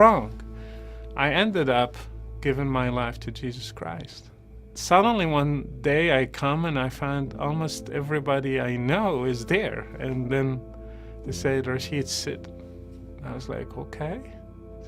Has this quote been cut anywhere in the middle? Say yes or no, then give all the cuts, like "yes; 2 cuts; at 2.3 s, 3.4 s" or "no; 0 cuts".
yes; 1 cut; at 4.6 s